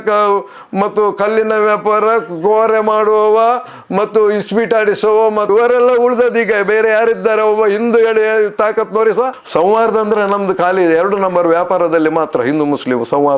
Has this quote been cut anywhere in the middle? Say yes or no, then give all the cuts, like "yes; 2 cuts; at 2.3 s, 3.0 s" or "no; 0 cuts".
yes; 2 cuts; at 5.5 s, 9.4 s